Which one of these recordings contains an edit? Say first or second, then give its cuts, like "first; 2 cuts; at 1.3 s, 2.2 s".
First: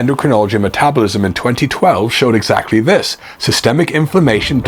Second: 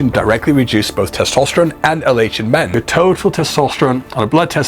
second; 1 cut; at 2.7 s